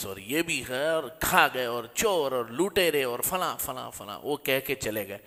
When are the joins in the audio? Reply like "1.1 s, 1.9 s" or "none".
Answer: none